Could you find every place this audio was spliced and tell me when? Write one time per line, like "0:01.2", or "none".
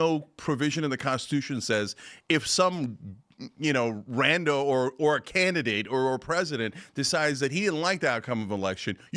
none